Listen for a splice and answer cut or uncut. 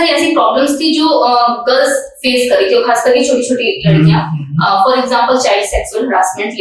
uncut